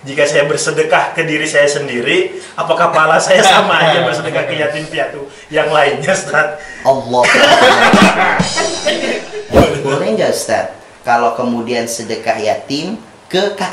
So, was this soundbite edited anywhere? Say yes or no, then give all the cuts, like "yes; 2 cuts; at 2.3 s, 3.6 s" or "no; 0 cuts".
yes; 1 cut; at 9.6 s